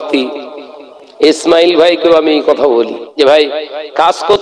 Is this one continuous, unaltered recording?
no; 1 cut; at 3.0 s

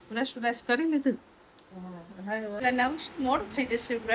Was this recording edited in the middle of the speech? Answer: yes; 1 cut; at 2.6 s

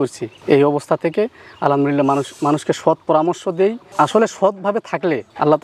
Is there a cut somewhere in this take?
no; 0 cuts

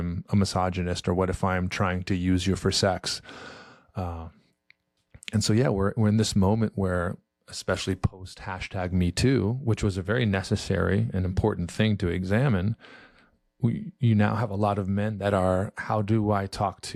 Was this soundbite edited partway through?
no; 0 cuts

